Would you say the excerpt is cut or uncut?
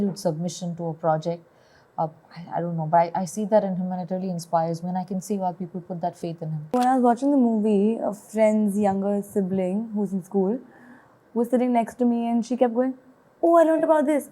cut